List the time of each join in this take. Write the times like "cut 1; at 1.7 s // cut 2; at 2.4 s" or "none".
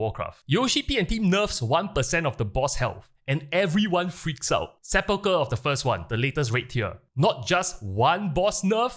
cut 1; at 4.7 s